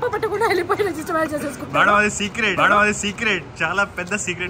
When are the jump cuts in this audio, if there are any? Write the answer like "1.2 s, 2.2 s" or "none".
3.4 s